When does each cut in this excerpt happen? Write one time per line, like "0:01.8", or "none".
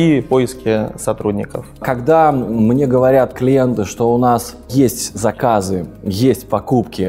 0:01.8
0:04.7